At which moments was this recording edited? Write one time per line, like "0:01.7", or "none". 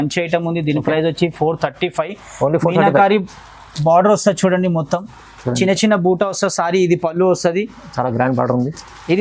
none